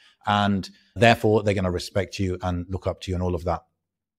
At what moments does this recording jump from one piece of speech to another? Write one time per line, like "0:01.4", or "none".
0:01.0